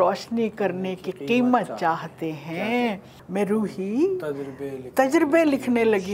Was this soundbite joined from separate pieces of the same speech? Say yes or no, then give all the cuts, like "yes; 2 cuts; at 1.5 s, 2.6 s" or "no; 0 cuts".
yes; 1 cut; at 3.1 s